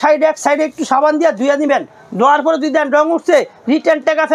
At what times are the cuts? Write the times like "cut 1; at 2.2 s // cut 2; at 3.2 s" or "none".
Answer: none

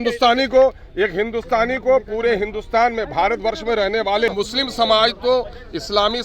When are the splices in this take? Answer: cut 1; at 4.3 s

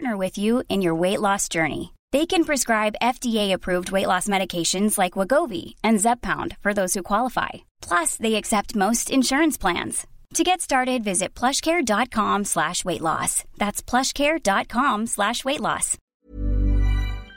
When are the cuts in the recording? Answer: cut 1; at 16.0 s

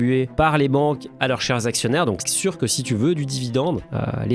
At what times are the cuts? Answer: cut 1; at 2.3 s

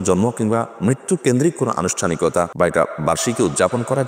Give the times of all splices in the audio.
cut 1; at 2.5 s

